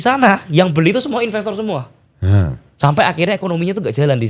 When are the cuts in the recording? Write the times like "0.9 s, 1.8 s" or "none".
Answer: none